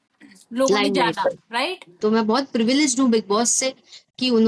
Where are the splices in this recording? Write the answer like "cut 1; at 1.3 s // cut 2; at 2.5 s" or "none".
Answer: cut 1; at 2.0 s